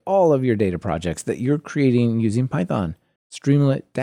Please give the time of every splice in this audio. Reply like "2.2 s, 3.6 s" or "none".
none